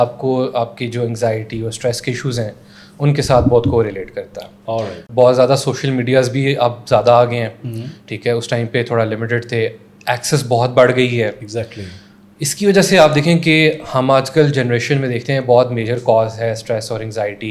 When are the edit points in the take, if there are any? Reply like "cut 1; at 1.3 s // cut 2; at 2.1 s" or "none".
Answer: cut 1; at 5.0 s